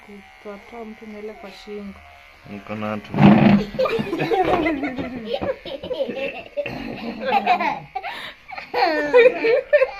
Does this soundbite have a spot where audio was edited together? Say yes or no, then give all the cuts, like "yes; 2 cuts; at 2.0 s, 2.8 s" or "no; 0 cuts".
no; 0 cuts